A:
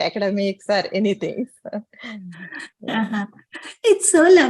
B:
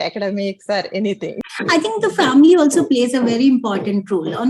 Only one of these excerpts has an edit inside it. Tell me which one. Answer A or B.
B